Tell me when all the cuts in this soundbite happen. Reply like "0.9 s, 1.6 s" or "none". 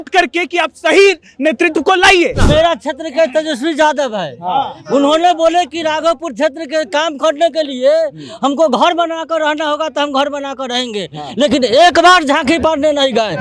2.4 s